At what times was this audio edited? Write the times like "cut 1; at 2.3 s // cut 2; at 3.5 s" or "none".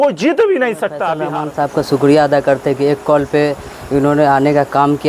cut 1; at 1.1 s